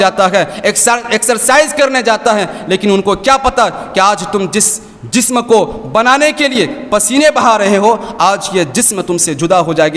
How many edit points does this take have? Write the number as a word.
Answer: zero